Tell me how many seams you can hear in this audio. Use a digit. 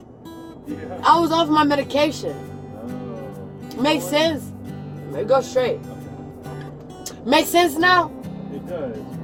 0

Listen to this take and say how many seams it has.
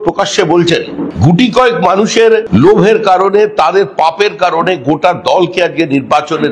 2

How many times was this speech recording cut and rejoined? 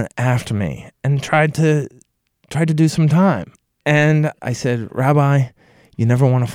1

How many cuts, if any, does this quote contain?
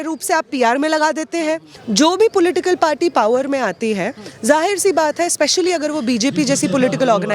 1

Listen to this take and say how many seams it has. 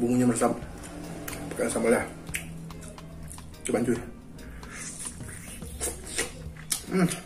0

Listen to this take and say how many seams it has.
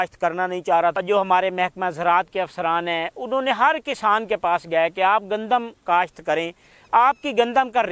1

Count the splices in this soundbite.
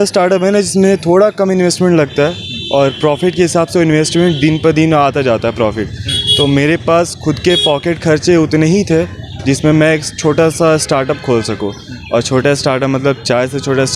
0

